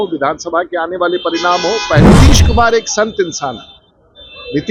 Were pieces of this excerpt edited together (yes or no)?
yes